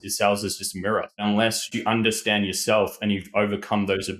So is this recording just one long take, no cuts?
no; 1 cut; at 1.2 s

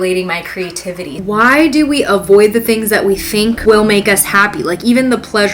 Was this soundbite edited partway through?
yes; 2 cuts; at 1.1 s, 3.6 s

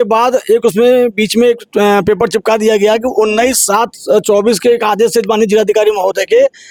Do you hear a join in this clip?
no; 0 cuts

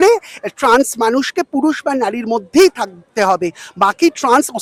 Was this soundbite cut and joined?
no; 0 cuts

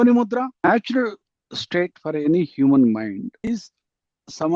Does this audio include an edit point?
yes; 2 cuts; at 0.7 s, 3.4 s

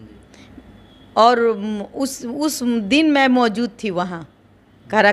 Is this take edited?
no; 0 cuts

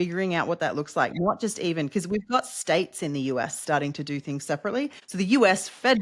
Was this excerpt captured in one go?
no; 1 cut; at 5.0 s

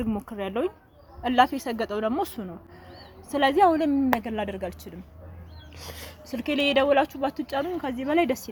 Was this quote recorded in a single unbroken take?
yes; 0 cuts

